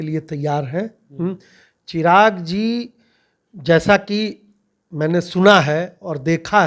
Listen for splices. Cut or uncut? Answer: uncut